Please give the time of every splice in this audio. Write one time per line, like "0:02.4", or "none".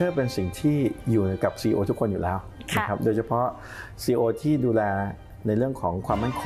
none